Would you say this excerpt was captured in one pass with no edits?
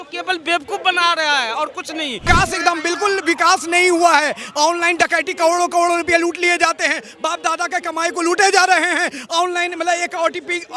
no; 1 cut; at 2.3 s

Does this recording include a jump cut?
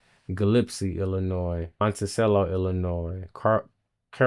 no; 0 cuts

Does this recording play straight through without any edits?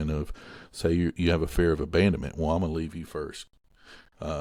yes; 0 cuts

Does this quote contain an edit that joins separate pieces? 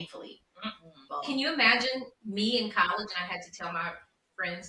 yes; 2 cuts; at 1.0 s, 2.2 s

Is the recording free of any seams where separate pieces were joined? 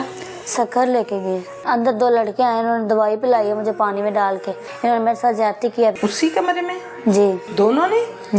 no; 4 cuts; at 1.5 s, 4.7 s, 6.0 s, 7.4 s

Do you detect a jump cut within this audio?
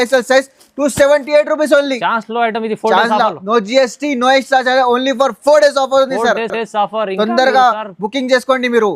no; 0 cuts

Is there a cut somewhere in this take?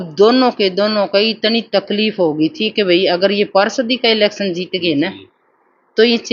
no; 0 cuts

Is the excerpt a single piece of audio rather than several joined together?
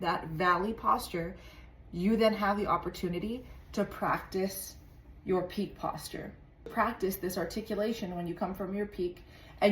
no; 1 cut; at 6.7 s

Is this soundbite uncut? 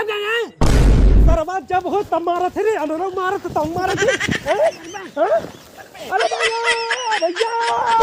yes; 0 cuts

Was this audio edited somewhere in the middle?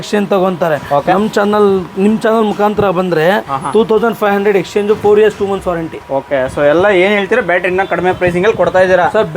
no; 0 cuts

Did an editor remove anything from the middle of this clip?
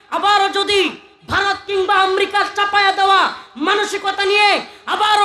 no; 0 cuts

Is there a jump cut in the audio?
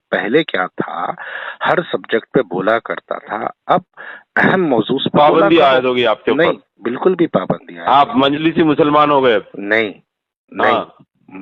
no; 0 cuts

